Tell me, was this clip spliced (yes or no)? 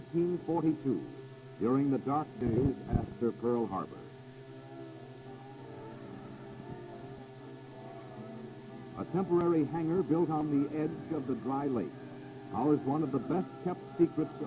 yes